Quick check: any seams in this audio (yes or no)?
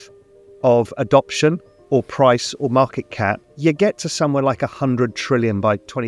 yes